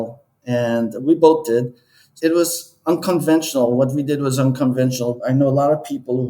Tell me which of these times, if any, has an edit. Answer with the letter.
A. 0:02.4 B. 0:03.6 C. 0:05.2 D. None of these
C